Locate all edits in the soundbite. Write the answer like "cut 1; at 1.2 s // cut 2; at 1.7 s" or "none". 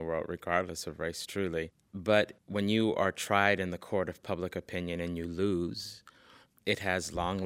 cut 1; at 1.8 s